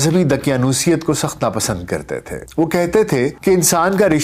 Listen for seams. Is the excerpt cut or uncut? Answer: cut